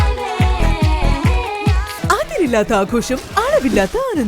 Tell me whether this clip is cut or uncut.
cut